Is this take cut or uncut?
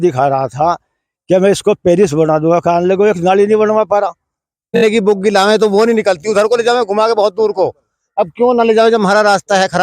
cut